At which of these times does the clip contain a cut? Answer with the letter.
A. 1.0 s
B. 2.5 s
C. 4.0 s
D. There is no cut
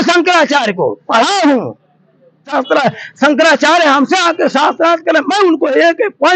B